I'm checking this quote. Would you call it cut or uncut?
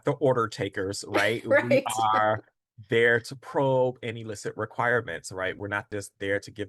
cut